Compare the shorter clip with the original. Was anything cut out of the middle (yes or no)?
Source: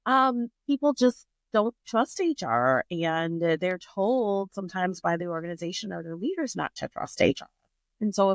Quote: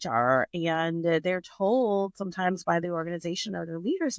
no